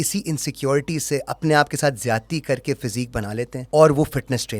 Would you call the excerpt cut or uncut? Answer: cut